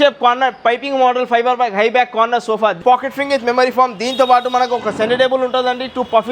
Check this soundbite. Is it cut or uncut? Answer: cut